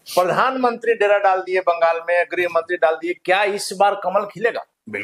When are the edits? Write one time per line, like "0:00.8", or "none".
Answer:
none